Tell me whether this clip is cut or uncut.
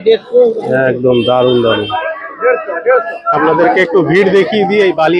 cut